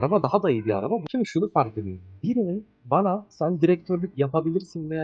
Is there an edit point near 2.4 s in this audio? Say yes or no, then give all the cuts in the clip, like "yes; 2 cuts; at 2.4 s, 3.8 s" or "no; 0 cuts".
no; 1 cut; at 1.0 s